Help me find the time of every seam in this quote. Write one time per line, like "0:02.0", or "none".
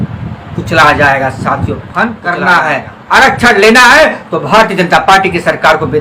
0:02.3